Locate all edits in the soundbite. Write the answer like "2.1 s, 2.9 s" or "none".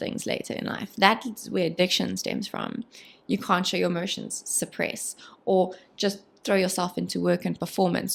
none